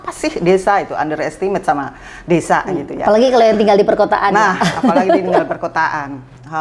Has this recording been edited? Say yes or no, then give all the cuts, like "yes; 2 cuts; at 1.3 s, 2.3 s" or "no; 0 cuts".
no; 0 cuts